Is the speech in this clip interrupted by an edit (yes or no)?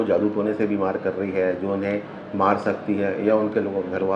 no